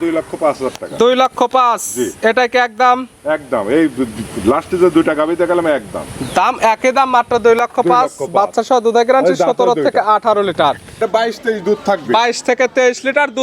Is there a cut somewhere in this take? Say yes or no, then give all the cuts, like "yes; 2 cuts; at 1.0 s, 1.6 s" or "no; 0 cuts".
yes; 1 cut; at 11.0 s